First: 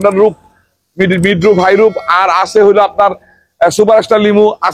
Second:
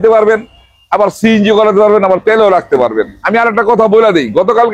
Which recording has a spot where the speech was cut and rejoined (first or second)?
second